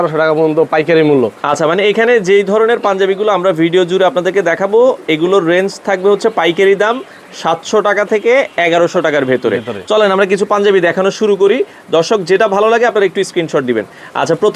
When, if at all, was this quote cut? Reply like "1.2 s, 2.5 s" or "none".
none

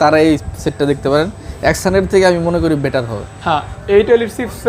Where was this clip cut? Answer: 3.7 s

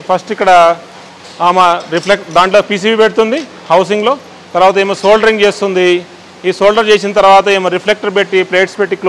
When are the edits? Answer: none

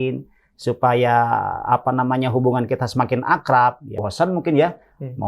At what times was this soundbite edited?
4.0 s

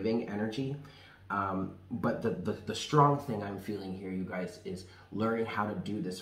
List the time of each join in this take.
none

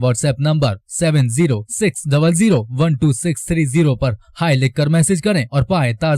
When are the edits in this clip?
none

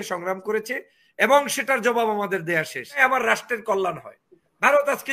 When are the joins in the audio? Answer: 3.0 s

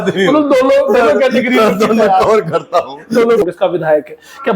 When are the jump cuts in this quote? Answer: 3.4 s

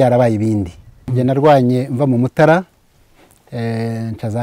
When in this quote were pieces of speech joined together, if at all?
1.0 s

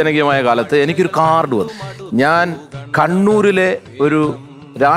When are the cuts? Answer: 1.7 s

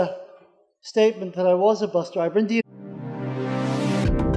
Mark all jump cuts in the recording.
none

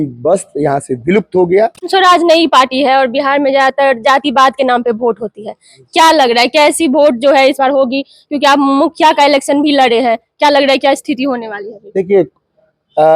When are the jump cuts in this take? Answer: 1.8 s

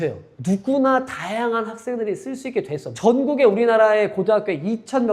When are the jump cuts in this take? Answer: 2.9 s

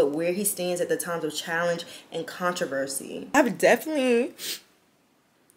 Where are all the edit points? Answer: 3.3 s

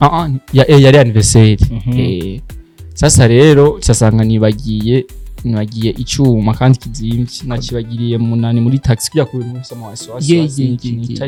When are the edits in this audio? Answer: none

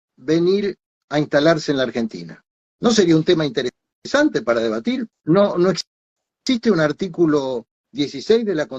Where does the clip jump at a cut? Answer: 5.1 s

